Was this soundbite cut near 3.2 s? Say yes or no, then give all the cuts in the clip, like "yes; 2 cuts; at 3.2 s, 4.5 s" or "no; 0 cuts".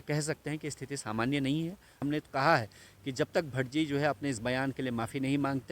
no; 1 cut; at 2.0 s